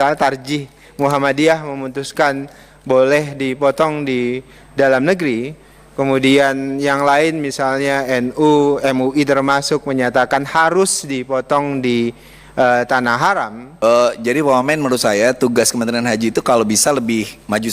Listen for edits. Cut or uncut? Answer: cut